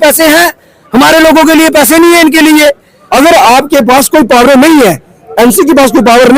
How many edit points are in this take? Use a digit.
1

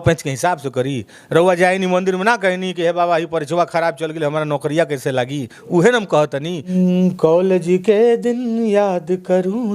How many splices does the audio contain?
1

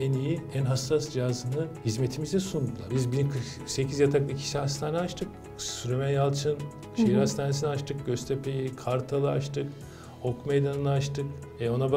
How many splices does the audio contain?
2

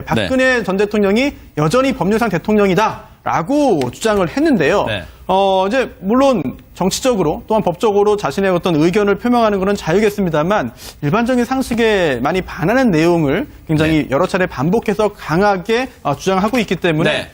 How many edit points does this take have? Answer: 1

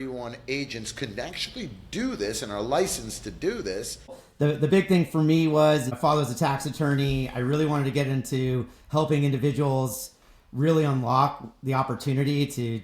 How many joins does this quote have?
2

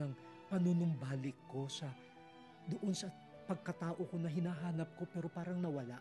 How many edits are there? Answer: 0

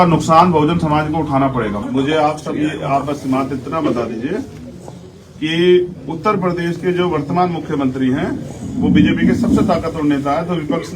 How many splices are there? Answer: 1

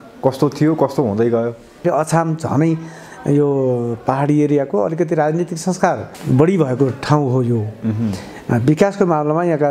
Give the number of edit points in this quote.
2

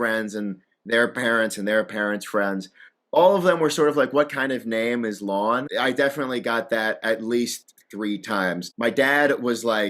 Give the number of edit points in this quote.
2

